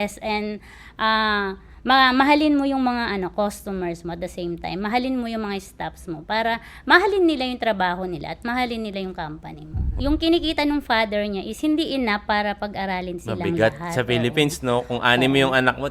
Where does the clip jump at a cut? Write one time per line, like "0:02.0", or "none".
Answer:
0:09.8